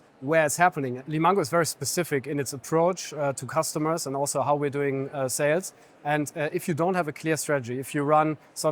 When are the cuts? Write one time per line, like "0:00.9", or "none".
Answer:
0:01.0